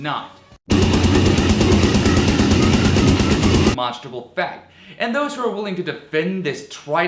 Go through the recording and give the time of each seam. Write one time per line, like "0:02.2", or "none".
none